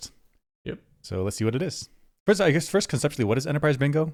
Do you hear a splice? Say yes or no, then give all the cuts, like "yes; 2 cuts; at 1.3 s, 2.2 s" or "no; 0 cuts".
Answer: no; 0 cuts